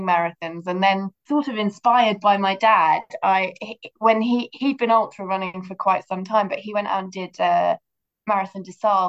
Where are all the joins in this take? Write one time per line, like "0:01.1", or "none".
0:01.1